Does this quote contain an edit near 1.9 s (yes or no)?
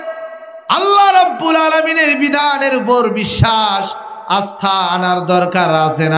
no